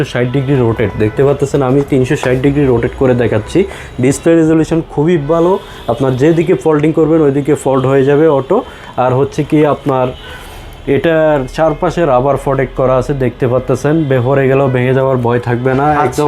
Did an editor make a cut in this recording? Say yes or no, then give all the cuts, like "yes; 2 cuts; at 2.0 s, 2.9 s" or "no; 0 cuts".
no; 0 cuts